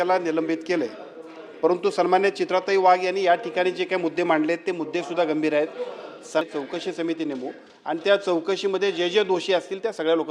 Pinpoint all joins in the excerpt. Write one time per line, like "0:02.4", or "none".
0:06.4